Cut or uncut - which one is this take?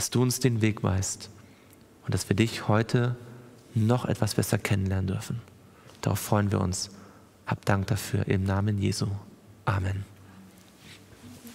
uncut